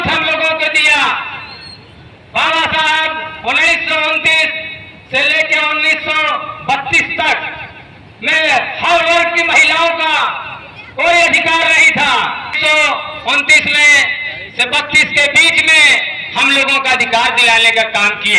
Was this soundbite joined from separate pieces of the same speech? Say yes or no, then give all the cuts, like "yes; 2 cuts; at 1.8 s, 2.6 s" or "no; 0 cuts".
yes; 1 cut; at 12.5 s